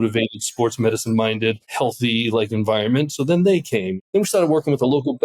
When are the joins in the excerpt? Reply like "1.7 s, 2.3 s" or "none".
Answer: 1.7 s, 3.9 s